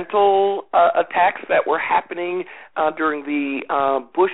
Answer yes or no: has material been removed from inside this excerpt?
no